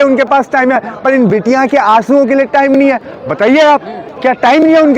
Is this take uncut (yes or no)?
yes